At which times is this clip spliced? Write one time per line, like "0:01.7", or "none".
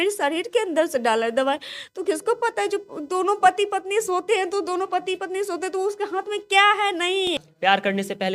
0:07.3